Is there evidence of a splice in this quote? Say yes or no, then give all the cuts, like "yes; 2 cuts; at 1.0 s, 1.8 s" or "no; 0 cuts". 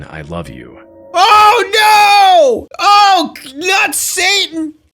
yes; 1 cut; at 2.7 s